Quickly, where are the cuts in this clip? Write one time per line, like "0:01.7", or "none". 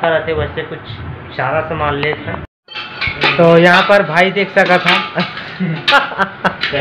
0:02.5